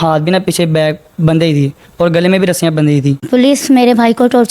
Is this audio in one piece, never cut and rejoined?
no; 1 cut; at 3.3 s

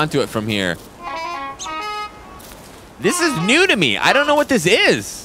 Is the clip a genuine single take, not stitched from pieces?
no; 1 cut; at 0.9 s

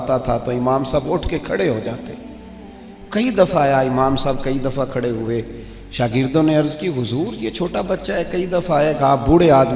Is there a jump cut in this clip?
no; 0 cuts

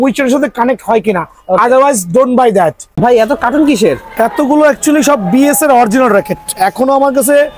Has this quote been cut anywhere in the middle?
yes; 1 cut; at 2.9 s

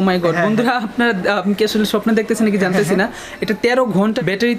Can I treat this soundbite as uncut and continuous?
yes; 0 cuts

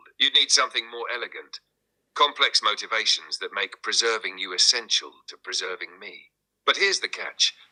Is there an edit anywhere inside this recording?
no; 0 cuts

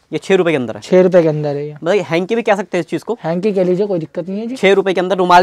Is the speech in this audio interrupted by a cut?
no; 0 cuts

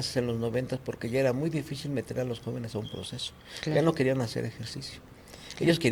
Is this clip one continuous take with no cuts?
yes; 0 cuts

